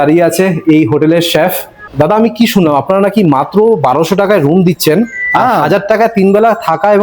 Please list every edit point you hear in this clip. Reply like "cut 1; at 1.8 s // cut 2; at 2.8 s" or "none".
cut 1; at 1.8 s